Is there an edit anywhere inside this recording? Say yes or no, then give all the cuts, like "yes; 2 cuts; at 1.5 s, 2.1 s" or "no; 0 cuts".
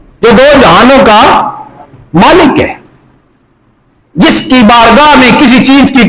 no; 0 cuts